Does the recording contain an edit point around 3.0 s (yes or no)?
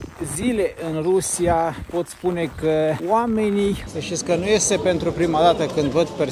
yes